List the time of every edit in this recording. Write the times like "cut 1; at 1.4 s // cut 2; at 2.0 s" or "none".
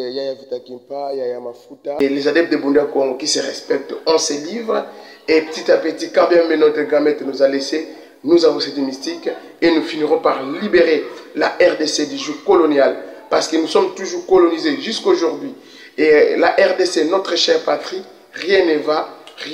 cut 1; at 2.0 s

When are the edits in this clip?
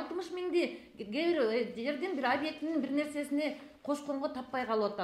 none

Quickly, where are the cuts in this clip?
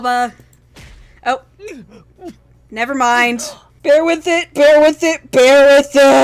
cut 1; at 3.7 s

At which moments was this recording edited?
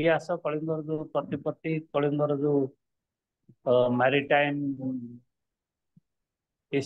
none

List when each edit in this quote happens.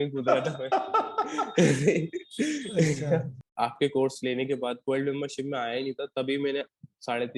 cut 1; at 3.3 s

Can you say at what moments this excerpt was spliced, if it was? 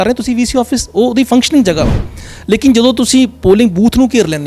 none

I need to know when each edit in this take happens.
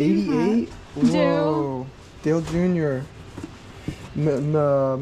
none

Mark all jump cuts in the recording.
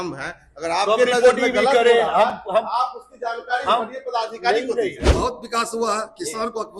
cut 1; at 5.0 s

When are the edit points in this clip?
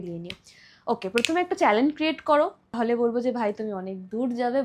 cut 1; at 2.7 s

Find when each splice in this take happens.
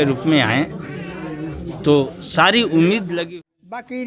cut 1; at 3.1 s

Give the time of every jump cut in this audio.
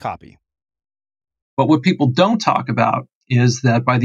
cut 1; at 1.5 s

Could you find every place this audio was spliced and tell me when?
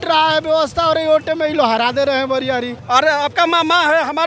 cut 1; at 2.7 s

